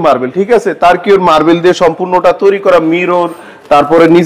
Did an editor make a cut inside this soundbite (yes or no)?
no